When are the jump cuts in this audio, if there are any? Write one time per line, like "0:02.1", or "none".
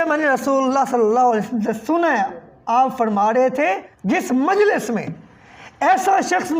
0:03.9